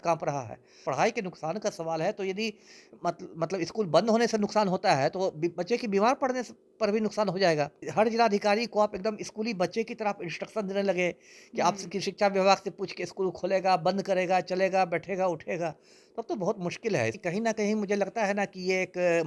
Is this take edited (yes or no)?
yes